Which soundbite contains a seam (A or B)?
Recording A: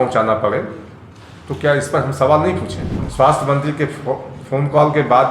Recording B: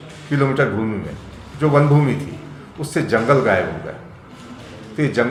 A